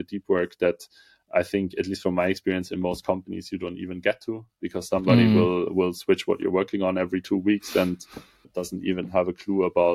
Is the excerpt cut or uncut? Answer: cut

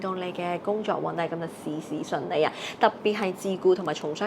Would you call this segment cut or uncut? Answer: uncut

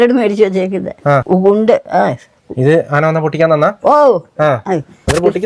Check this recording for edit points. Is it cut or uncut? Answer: cut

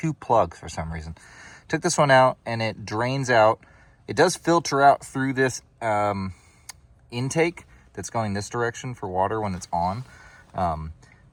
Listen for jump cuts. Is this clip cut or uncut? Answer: uncut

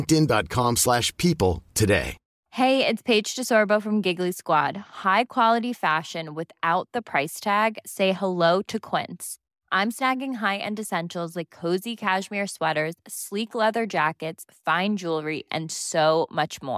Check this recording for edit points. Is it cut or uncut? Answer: uncut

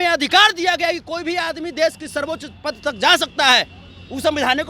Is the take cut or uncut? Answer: uncut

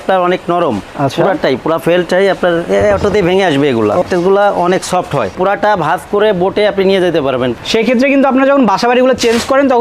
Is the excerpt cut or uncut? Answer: cut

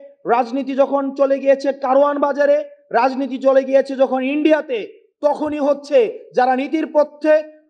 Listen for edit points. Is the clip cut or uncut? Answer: uncut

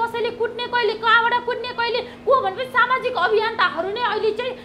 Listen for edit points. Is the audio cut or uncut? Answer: uncut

